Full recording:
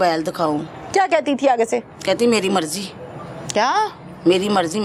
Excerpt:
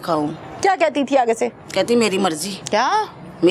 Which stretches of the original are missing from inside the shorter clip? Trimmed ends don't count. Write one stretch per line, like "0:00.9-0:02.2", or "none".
0:02.8-0:03.3